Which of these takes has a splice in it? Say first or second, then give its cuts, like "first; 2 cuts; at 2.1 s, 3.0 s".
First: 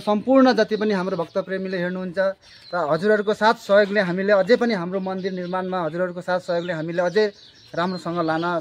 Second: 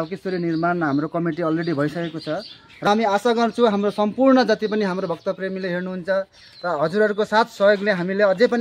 second; 1 cut; at 2.9 s